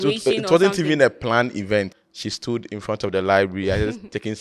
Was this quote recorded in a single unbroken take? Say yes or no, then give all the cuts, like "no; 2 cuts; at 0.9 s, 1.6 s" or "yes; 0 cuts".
no; 1 cut; at 2.0 s